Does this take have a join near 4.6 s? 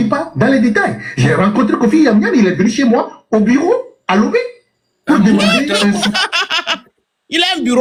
no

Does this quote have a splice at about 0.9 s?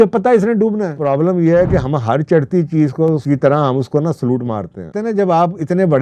yes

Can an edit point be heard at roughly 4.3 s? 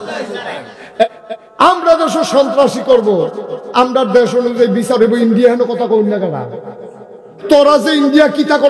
no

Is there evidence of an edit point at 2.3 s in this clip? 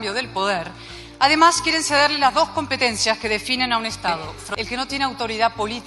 no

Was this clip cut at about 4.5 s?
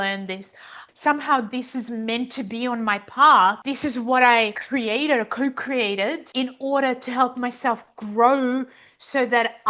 yes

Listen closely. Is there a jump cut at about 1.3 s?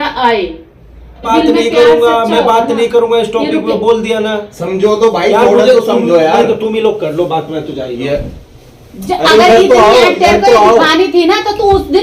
yes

